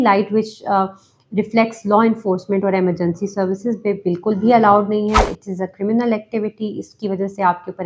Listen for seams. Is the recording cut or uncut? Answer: uncut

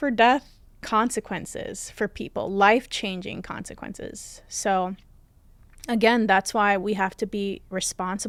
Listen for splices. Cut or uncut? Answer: uncut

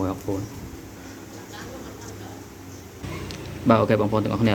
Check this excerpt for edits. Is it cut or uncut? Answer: cut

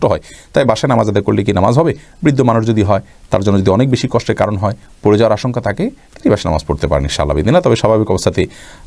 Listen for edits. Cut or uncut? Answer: uncut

